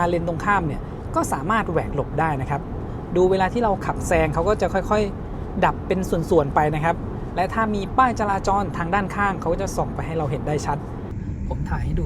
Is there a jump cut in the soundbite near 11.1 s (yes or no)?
yes